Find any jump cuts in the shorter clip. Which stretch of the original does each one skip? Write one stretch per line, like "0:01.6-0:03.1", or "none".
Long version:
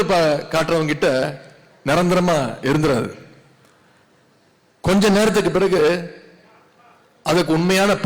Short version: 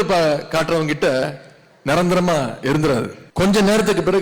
0:03.2-0:04.7